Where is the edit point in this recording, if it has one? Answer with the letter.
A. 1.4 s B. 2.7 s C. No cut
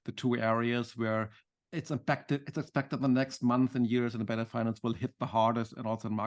A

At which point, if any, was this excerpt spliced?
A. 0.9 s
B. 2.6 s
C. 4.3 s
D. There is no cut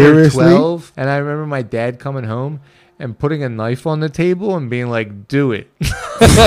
A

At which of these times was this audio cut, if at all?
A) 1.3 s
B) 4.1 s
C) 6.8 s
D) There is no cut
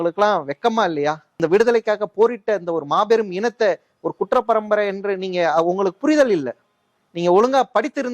A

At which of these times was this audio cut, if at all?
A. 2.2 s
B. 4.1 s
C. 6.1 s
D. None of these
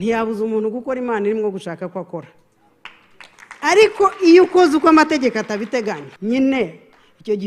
C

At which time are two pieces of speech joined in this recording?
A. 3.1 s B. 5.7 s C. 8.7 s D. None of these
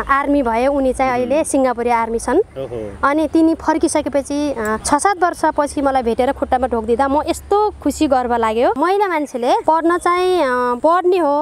C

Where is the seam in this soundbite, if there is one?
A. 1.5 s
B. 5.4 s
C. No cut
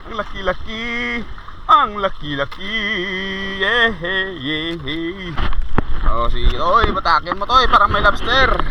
B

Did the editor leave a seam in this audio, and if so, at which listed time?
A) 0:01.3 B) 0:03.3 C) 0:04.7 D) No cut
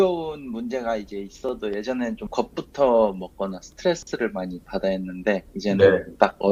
D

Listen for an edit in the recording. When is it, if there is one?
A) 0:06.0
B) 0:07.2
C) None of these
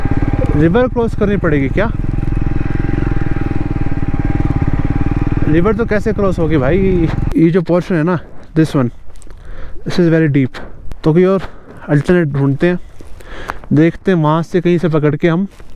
B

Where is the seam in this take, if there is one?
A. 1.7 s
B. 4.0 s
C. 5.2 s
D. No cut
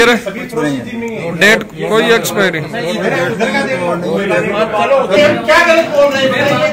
C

